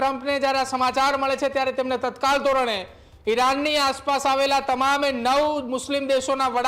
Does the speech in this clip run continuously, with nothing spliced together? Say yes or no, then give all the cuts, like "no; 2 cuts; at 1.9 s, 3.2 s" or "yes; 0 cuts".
yes; 0 cuts